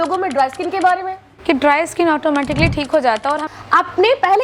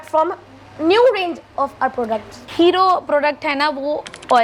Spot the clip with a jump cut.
first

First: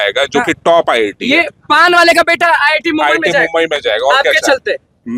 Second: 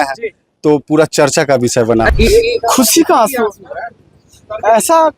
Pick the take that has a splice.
second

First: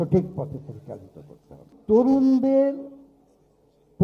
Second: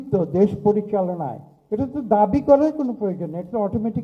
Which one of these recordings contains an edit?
first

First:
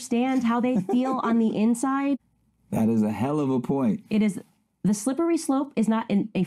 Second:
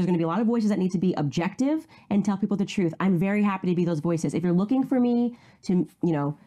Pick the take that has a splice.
first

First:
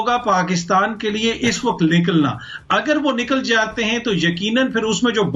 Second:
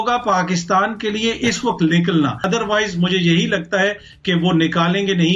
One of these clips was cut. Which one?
second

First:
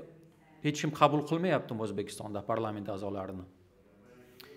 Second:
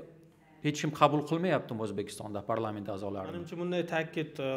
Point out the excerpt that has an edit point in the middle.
second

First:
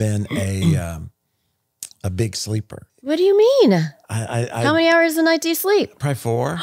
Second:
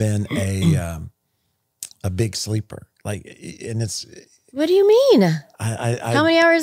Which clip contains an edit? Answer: first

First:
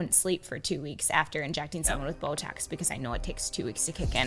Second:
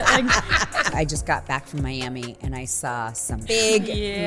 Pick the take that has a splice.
second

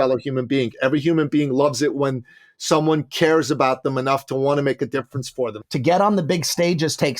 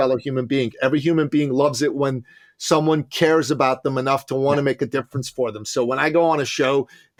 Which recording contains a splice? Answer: first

